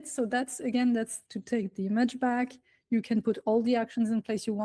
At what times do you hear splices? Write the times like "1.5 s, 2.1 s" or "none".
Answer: none